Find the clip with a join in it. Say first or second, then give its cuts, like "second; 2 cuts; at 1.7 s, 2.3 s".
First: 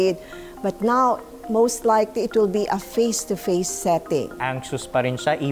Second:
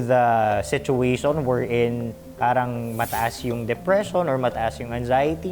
first; 1 cut; at 4.4 s